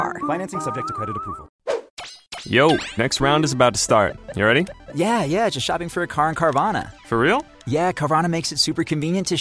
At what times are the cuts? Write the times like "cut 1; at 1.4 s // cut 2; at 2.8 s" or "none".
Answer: cut 1; at 1.8 s

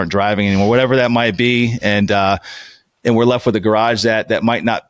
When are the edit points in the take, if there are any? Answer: none

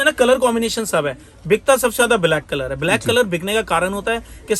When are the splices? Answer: none

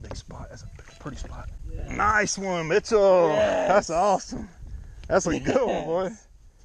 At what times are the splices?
cut 1; at 1.6 s

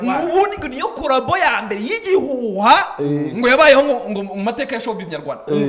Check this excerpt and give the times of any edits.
none

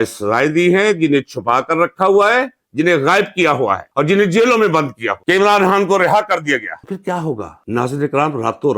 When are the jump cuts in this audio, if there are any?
cut 1; at 5.1 s

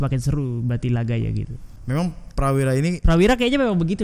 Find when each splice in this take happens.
cut 1; at 1.7 s

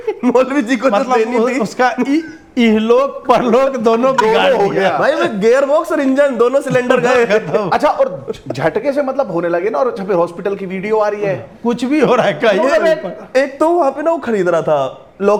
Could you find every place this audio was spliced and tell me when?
none

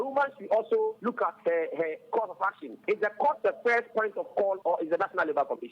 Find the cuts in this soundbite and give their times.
cut 1; at 1.0 s // cut 2; at 2.8 s // cut 3; at 4.6 s

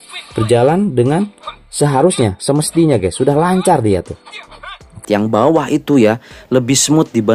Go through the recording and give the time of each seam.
cut 1; at 5.0 s

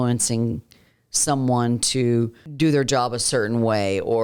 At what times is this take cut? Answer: cut 1; at 2.4 s

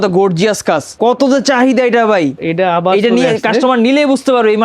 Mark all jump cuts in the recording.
cut 1; at 0.9 s // cut 2; at 2.4 s

